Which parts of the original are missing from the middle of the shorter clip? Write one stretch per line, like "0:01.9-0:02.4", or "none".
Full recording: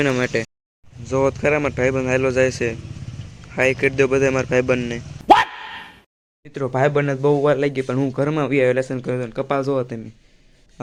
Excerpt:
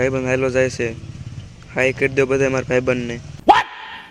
none

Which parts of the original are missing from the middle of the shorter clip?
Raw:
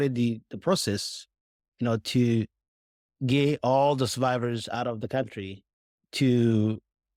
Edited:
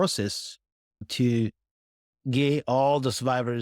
0:01.8-0:02.0

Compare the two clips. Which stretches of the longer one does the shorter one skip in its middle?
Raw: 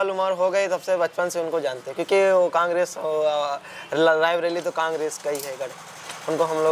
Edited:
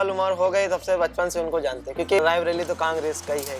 0:02.2-0:04.2

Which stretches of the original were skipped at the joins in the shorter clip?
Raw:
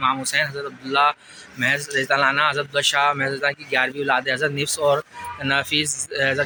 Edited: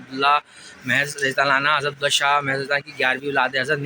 none

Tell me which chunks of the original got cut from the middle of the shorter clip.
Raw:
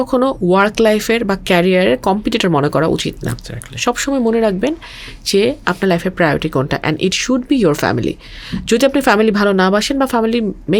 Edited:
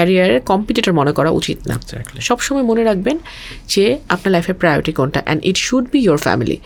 none

